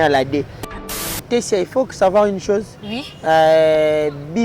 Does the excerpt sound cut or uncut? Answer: cut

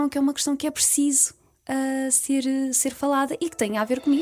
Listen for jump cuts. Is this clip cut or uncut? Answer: uncut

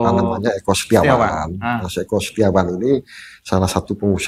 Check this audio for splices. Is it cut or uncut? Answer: uncut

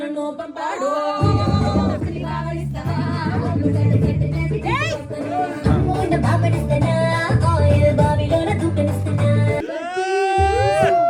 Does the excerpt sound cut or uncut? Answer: cut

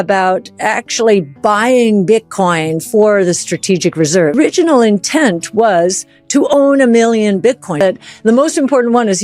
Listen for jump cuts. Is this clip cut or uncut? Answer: cut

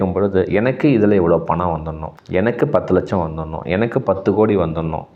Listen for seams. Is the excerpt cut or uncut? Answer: uncut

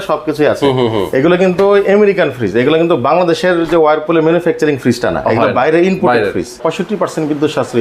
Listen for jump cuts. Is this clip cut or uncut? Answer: cut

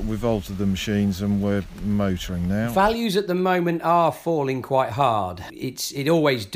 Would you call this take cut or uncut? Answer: cut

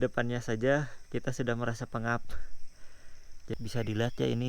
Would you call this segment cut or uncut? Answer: cut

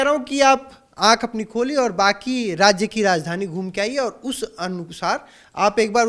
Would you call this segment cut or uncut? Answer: uncut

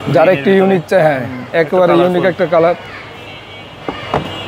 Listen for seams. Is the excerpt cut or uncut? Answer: uncut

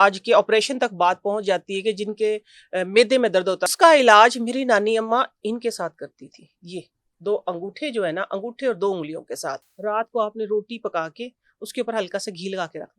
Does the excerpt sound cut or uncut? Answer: cut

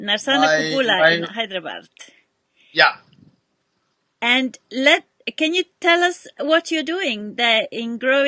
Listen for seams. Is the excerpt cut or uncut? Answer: cut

